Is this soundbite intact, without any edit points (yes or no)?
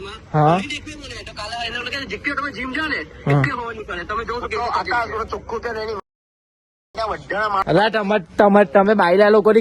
yes